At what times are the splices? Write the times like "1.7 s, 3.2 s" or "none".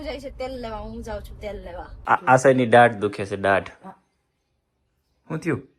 2.0 s